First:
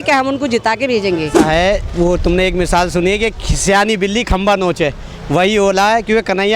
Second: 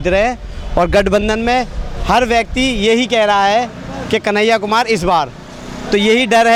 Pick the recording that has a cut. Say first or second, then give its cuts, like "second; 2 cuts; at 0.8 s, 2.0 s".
first; 1 cut; at 1.3 s